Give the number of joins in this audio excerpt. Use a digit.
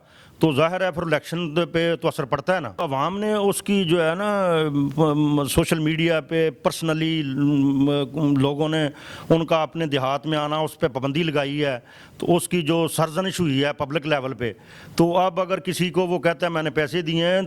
1